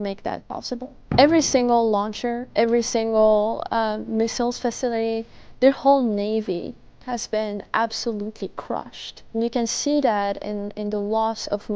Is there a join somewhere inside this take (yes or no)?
yes